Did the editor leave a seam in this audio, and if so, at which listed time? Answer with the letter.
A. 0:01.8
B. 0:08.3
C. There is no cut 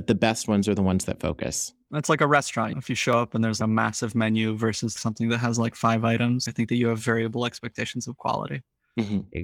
A